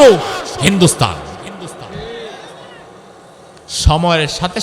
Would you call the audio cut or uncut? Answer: uncut